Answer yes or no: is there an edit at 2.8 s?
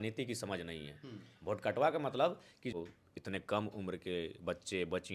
yes